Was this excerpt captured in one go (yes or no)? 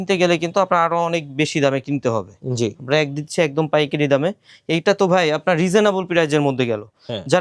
yes